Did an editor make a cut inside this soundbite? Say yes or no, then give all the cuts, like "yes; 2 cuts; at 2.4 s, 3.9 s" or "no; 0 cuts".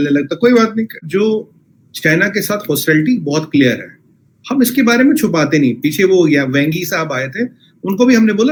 no; 0 cuts